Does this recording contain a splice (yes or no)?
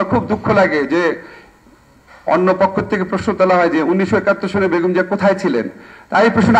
no